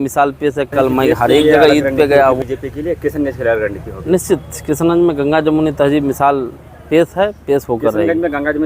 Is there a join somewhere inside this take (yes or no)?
yes